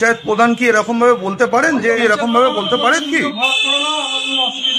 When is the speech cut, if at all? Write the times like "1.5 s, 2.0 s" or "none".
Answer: 2.0 s

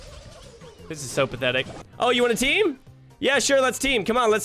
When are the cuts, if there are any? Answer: 1.8 s

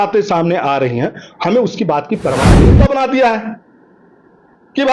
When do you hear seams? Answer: 2.7 s

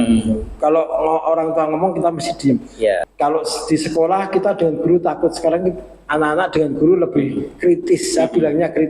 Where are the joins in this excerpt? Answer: 3.1 s

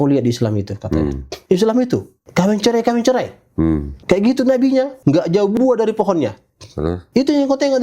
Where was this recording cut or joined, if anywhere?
1.3 s, 2.2 s, 3.9 s, 4.9 s, 7.0 s

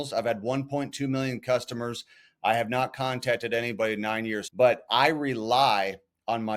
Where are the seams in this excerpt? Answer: 4.4 s

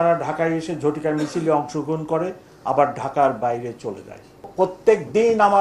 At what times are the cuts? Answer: 4.4 s

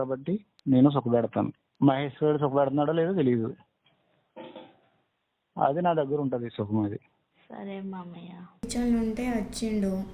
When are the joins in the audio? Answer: 8.7 s

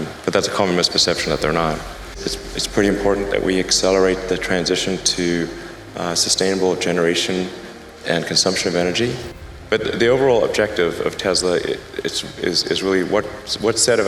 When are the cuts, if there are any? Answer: 2.1 s, 9.9 s

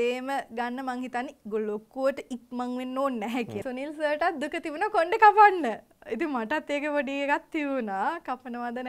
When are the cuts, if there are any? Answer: 3.6 s

